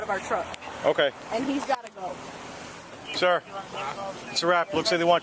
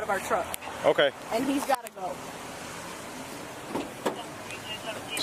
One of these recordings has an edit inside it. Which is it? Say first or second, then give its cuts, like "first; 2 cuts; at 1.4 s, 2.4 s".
first; 1 cut; at 2.9 s